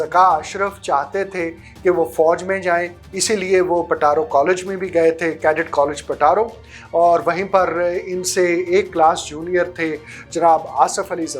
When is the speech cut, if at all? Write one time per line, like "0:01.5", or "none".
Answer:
none